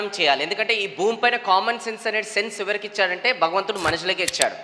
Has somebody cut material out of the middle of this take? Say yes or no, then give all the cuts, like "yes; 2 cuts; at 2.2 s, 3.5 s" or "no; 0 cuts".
no; 0 cuts